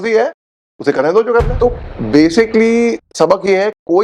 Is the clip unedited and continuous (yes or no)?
no